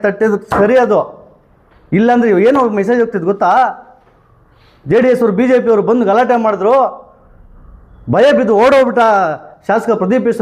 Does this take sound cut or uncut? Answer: uncut